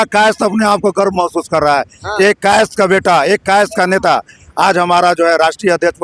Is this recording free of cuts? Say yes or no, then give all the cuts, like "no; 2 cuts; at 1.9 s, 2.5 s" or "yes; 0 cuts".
yes; 0 cuts